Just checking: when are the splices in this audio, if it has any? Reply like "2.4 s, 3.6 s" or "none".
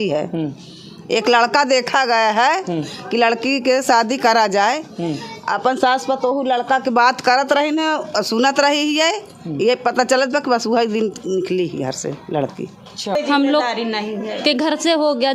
13.2 s